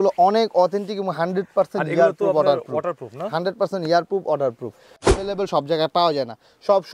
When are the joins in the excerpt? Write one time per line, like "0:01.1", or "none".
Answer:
0:05.0